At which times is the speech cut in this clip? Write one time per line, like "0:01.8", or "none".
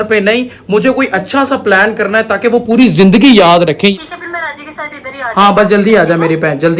0:03.9